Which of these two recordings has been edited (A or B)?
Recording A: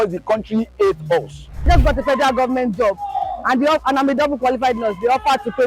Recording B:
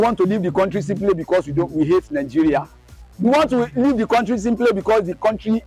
A